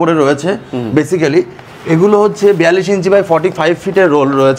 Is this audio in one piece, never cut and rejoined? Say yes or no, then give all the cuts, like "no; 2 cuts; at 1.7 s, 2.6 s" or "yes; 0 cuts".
yes; 0 cuts